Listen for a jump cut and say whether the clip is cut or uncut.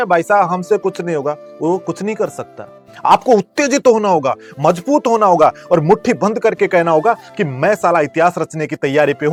uncut